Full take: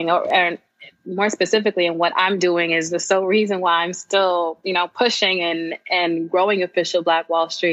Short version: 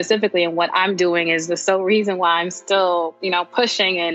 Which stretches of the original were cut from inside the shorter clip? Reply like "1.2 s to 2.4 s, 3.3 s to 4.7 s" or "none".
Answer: none